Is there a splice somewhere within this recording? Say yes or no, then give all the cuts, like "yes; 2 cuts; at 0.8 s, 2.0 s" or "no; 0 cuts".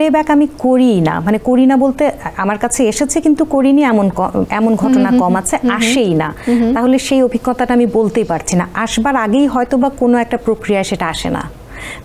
no; 0 cuts